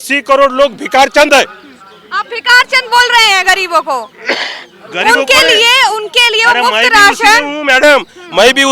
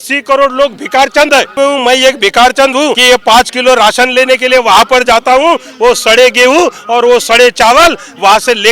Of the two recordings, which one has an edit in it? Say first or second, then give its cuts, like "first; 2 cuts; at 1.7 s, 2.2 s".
second; 2 cuts; at 1.5 s, 3.0 s